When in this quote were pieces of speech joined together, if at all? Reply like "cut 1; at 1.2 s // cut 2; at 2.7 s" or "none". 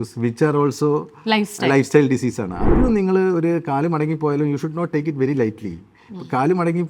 cut 1; at 2.7 s